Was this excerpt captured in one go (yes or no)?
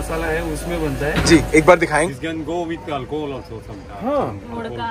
no